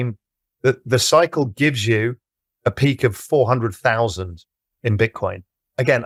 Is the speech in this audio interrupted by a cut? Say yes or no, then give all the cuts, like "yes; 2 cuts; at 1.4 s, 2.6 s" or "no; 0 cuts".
no; 0 cuts